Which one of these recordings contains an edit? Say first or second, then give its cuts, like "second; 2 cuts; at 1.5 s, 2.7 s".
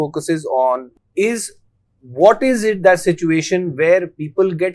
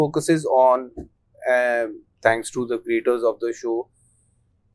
first; 1 cut; at 1.0 s